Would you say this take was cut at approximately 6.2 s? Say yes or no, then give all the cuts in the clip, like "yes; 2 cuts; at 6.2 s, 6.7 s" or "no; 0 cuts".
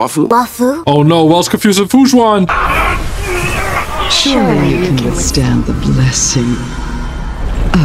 no; 1 cut; at 2.5 s